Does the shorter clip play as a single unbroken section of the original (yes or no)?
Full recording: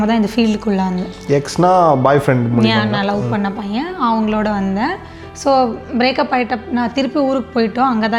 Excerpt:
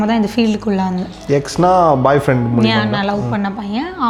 yes